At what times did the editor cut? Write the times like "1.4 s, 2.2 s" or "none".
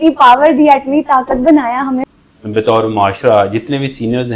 2.1 s